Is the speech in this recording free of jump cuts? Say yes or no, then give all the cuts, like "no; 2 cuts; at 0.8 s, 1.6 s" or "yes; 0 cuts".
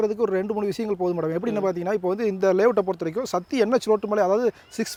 yes; 0 cuts